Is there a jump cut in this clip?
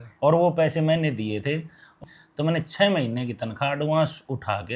yes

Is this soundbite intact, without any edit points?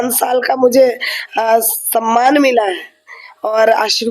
yes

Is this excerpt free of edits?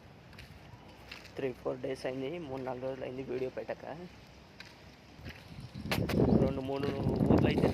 no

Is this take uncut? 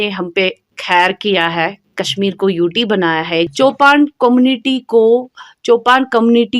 no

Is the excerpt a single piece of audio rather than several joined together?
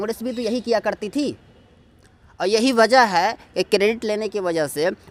yes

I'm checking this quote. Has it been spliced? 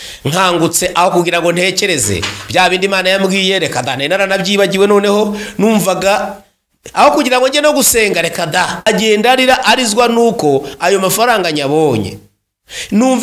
yes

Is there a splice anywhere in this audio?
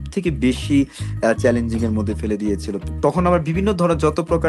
yes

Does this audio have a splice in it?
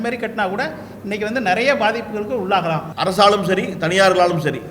yes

